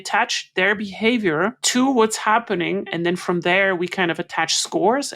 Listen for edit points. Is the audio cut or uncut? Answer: cut